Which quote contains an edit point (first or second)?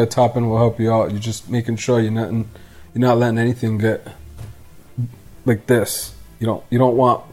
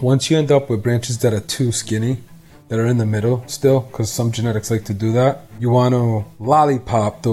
second